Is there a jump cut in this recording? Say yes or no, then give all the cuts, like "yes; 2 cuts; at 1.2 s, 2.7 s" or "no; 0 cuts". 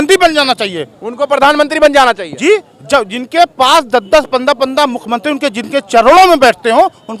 no; 0 cuts